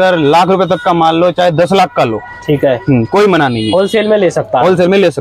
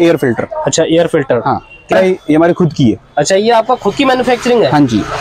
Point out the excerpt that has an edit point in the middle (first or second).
second